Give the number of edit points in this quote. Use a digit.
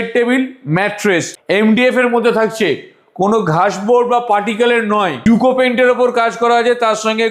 2